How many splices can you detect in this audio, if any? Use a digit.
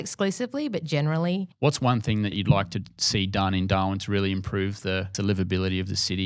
3